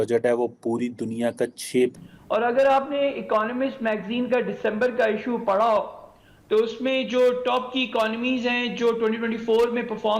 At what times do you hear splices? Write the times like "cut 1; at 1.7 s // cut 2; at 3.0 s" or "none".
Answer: cut 1; at 1.9 s